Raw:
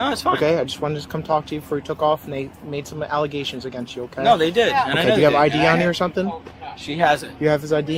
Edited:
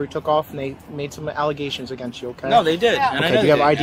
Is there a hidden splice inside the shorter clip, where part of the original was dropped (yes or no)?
no